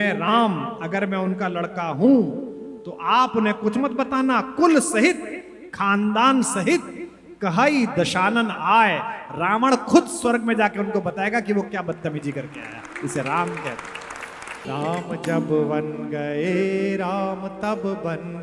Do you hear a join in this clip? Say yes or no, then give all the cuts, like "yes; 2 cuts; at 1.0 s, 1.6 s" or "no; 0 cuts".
yes; 1 cut; at 14.7 s